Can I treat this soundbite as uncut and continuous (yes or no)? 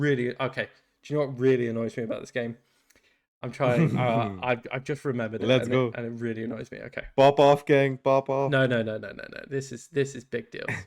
yes